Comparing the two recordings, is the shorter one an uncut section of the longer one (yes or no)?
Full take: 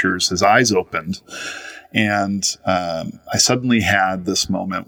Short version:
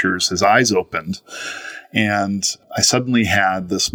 no